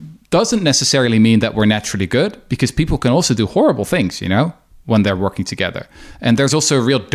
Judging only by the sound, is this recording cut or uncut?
uncut